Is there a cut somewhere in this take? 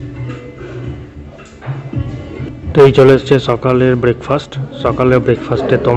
no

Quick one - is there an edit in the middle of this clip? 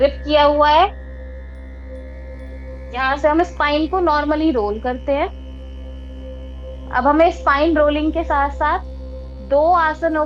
no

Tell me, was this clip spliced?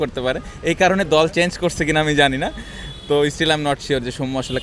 no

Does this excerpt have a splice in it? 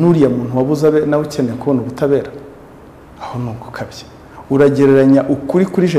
no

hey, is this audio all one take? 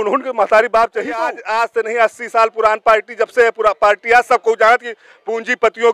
no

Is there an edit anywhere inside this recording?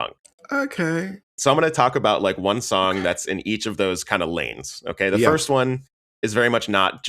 yes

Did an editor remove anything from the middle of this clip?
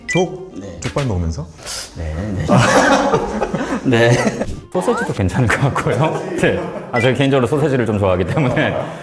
yes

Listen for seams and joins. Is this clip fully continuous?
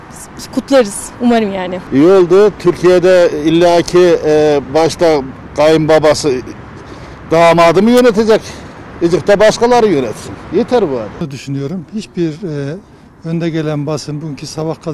yes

